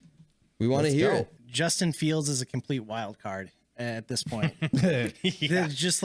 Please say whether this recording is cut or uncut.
cut